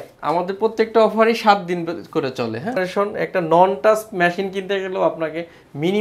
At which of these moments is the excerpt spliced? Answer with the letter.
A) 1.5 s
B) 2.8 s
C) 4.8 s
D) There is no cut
B